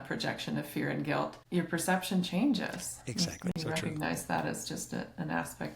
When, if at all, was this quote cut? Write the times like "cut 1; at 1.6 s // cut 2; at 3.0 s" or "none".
cut 1; at 3.5 s